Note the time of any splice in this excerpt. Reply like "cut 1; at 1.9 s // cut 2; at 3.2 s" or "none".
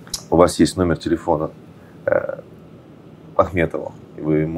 none